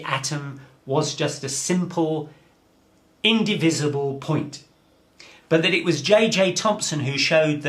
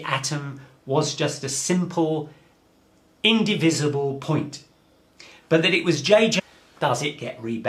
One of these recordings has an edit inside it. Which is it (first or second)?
first